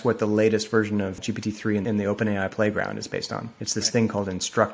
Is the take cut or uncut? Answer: cut